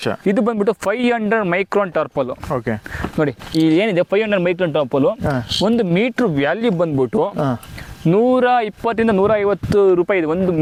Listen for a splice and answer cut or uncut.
uncut